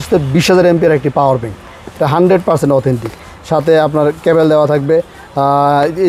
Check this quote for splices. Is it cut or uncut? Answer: uncut